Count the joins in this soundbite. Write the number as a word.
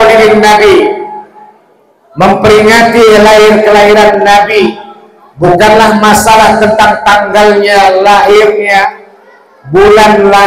zero